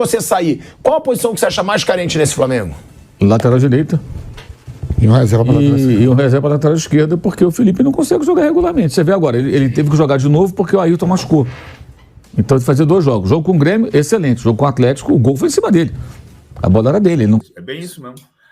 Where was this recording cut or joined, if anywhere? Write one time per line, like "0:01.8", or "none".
0:17.4